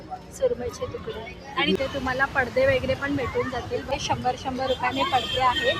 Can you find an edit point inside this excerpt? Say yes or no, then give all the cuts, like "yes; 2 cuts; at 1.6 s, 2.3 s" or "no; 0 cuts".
yes; 2 cuts; at 1.8 s, 3.9 s